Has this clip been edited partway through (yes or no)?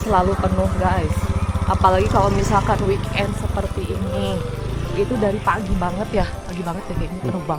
no